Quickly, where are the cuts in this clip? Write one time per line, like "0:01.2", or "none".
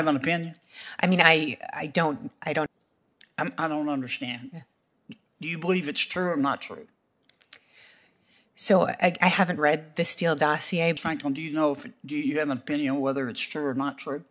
0:02.7
0:11.0

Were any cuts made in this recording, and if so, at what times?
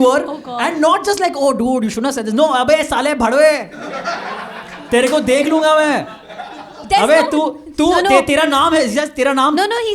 none

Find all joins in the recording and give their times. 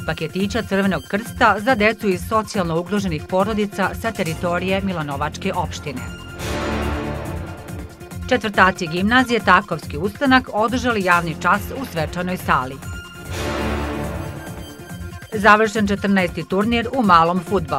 none

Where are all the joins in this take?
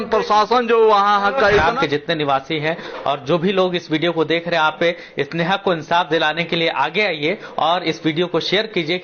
0:01.6

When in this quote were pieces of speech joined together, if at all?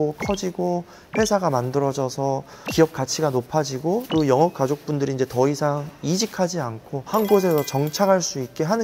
0:04.1
0:06.9

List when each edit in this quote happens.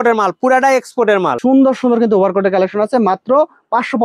0:01.3

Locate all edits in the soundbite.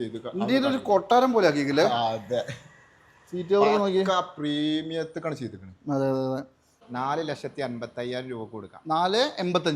0:06.8

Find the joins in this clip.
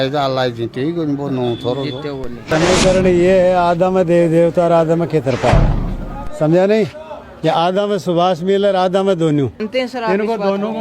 0:02.5
0:09.6

